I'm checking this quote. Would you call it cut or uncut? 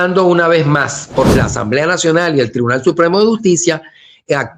cut